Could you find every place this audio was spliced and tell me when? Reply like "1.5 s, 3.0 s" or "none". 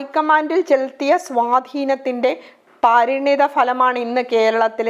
none